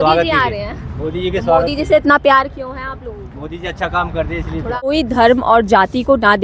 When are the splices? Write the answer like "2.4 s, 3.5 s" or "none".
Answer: 4.9 s

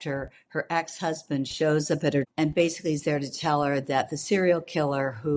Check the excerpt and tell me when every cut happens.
2.3 s

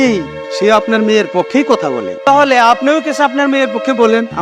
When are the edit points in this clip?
2.1 s

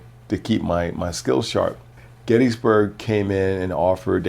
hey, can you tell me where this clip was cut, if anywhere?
1.9 s

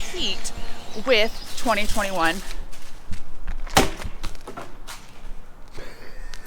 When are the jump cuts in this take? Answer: 4.4 s

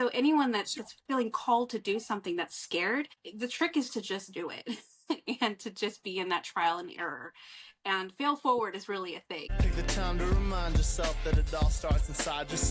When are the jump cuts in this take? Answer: 3.2 s, 9.4 s

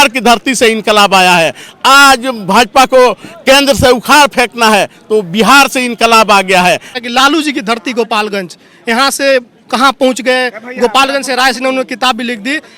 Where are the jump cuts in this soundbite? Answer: 6.9 s

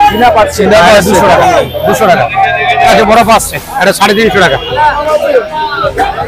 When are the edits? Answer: 3.0 s

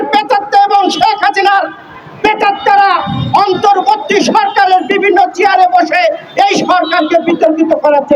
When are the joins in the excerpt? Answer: none

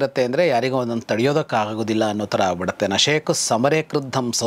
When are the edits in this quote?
none

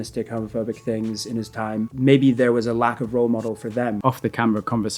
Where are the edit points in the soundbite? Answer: 1.9 s, 4.0 s

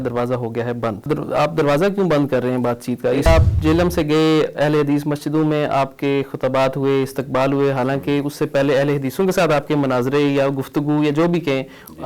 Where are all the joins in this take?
1.0 s, 3.2 s

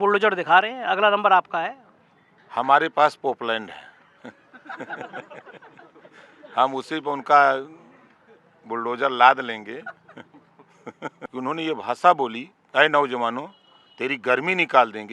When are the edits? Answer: 11.2 s

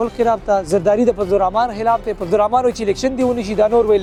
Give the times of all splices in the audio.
none

